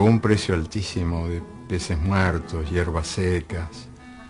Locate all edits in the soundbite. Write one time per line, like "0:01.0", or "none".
0:01.8